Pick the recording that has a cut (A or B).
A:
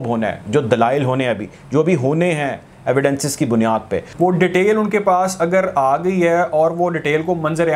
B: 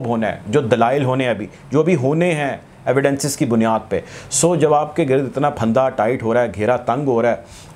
A